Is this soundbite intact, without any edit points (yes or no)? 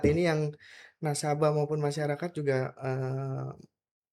yes